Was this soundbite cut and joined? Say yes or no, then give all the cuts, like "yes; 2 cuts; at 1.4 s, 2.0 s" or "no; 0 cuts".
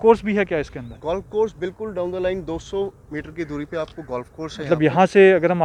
no; 0 cuts